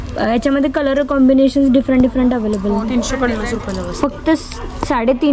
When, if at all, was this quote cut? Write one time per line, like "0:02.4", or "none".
0:02.9